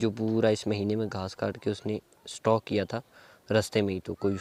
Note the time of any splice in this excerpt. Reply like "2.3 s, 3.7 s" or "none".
none